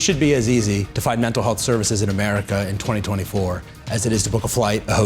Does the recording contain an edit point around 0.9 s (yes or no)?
yes